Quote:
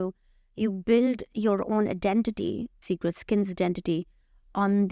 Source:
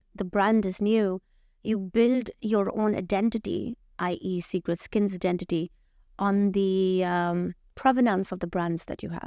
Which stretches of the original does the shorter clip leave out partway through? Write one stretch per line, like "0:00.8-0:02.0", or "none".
0:03.9-0:04.4